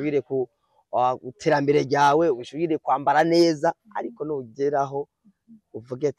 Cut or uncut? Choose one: uncut